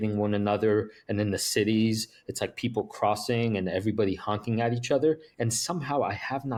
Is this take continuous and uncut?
yes; 0 cuts

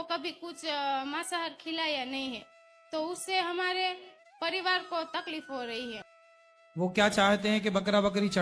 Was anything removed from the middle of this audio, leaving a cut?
yes; 1 cut; at 6.1 s

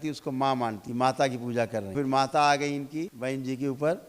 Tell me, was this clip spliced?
yes; 3 cuts; at 0.8 s, 1.9 s, 3.1 s

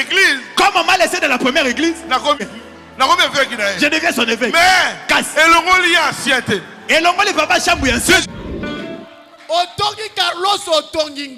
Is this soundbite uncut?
no; 2 cuts; at 2.4 s, 8.2 s

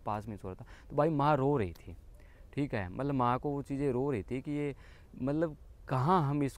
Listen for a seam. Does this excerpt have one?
no; 0 cuts

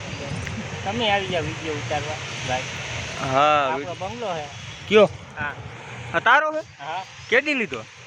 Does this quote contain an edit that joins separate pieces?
no; 0 cuts

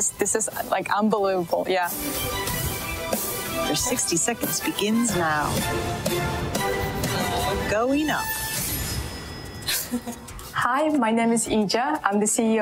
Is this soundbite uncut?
yes; 0 cuts

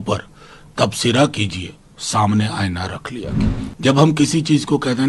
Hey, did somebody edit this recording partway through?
yes; 1 cut; at 3.6 s

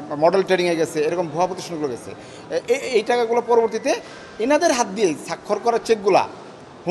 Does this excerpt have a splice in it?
no; 0 cuts

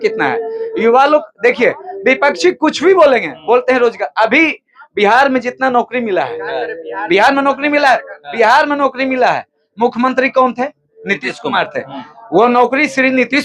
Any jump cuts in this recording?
no; 0 cuts

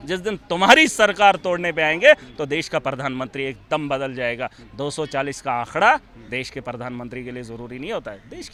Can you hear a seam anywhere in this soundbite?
no; 0 cuts

